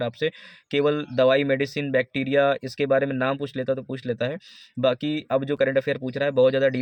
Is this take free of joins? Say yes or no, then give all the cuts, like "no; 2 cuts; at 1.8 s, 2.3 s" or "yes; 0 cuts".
yes; 0 cuts